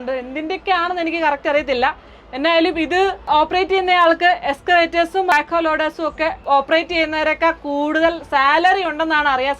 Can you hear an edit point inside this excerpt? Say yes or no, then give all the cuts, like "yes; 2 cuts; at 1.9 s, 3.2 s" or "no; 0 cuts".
yes; 2 cuts; at 5.3 s, 6.4 s